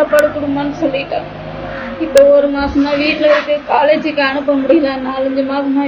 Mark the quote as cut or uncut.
uncut